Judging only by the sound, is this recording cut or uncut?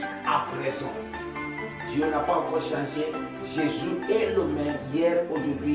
uncut